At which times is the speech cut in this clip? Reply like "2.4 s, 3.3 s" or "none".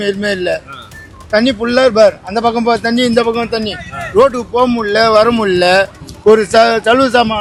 none